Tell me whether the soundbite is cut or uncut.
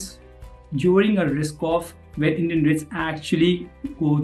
uncut